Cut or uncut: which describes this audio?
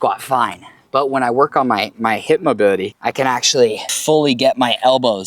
cut